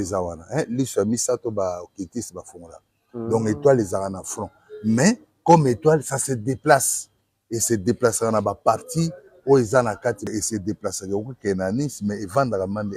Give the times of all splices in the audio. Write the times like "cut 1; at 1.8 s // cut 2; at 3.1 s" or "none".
cut 1; at 10.3 s